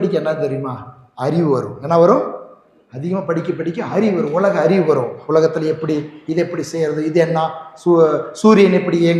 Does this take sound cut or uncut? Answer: uncut